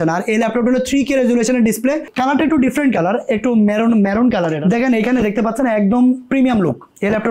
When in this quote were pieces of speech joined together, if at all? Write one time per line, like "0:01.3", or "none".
0:02.1
0:04.6